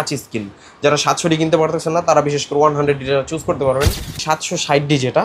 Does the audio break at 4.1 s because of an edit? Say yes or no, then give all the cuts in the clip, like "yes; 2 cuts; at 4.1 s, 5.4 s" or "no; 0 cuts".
yes; 1 cut; at 4.1 s